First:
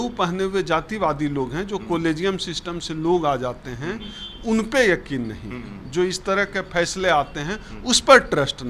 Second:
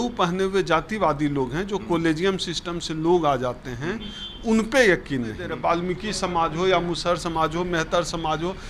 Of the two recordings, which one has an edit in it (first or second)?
second